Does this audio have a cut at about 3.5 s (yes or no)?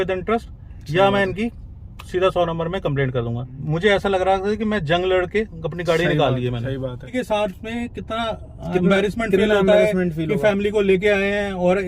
yes